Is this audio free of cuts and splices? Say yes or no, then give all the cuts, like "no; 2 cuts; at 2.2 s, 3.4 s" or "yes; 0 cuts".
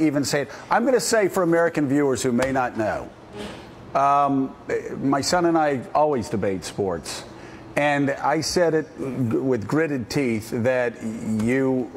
no; 1 cut; at 7.6 s